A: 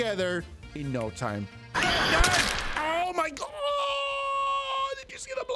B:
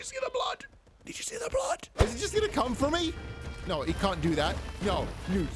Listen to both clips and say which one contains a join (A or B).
B